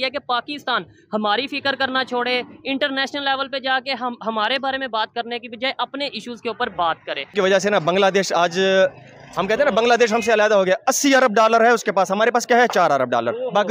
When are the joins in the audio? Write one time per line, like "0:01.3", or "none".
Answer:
0:07.3